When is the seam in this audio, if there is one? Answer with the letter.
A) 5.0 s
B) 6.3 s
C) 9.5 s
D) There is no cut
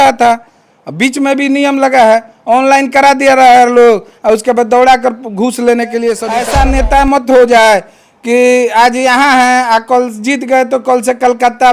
B